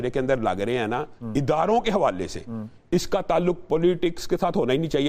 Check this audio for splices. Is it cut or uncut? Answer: uncut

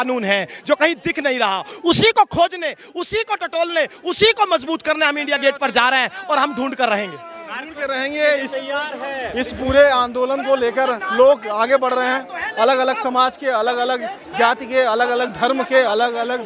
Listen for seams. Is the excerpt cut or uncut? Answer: uncut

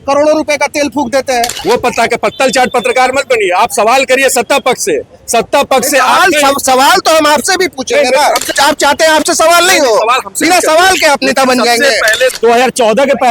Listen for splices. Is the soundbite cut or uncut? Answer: cut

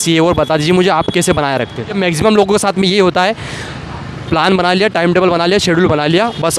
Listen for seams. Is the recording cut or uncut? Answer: cut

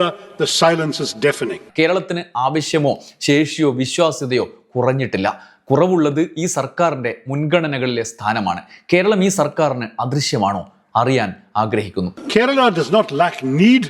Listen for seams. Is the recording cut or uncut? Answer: uncut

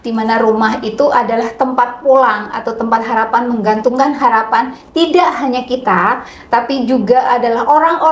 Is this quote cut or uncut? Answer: uncut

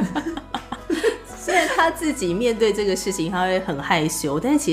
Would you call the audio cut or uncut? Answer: uncut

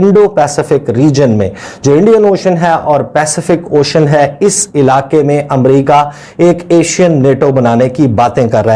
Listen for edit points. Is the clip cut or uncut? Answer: uncut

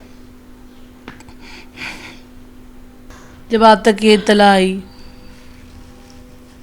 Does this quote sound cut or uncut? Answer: cut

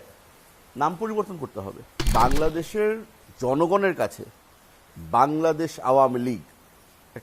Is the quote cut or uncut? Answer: cut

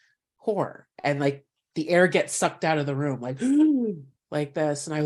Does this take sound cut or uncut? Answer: uncut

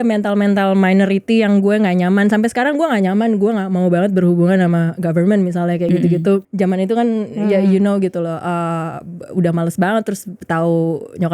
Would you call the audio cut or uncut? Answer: cut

